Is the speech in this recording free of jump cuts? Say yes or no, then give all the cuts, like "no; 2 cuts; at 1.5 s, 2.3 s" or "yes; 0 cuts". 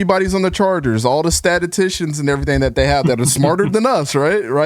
yes; 0 cuts